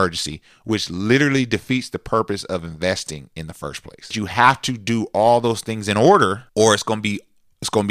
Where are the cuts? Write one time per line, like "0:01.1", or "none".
0:04.1
0:06.4